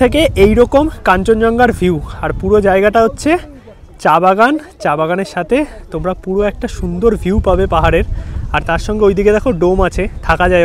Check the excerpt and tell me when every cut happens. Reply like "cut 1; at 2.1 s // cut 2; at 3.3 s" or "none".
none